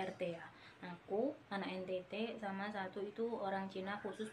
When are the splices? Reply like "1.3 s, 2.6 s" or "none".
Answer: none